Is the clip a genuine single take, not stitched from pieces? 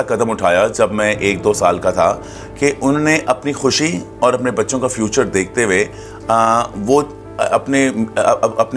yes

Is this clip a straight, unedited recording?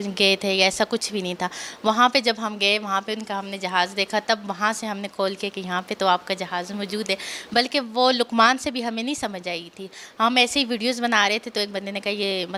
yes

